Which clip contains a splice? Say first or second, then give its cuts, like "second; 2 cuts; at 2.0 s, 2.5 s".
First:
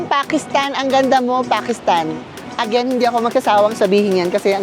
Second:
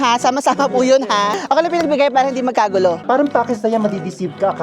second; 2 cuts; at 1.4 s, 3.0 s